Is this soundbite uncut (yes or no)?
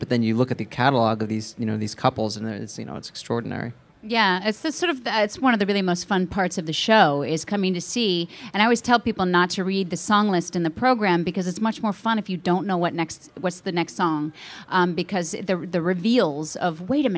yes